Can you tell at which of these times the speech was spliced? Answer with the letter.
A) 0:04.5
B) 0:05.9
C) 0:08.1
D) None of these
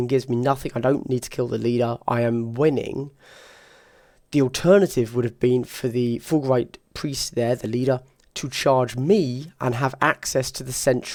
D